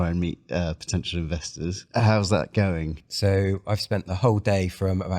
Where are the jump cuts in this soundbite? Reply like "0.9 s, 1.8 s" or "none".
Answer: 1.8 s, 3.0 s

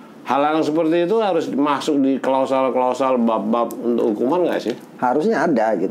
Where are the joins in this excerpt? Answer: none

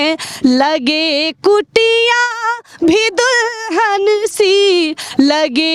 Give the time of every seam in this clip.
none

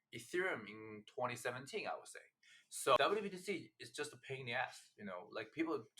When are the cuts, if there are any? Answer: 3.0 s

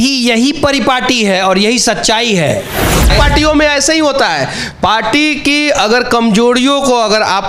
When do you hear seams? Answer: 3.1 s

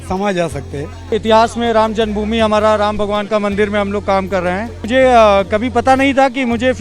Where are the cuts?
1.1 s, 4.8 s

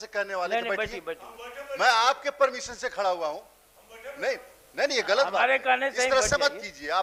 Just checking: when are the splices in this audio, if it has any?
none

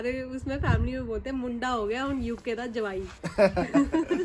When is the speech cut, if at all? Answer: none

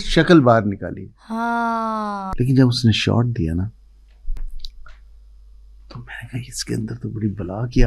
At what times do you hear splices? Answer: 2.3 s

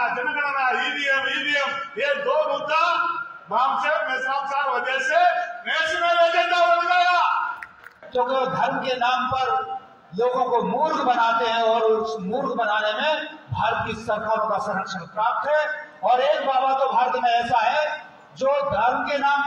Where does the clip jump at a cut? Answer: 8.0 s

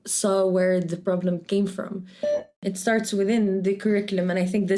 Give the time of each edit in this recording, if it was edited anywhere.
2.4 s

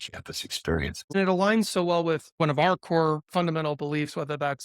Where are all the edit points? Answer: 1.1 s

